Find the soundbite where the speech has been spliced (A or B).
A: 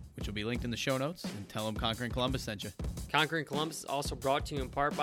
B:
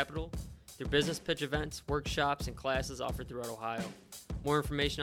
A